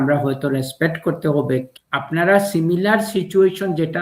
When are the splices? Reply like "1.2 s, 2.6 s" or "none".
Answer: 1.7 s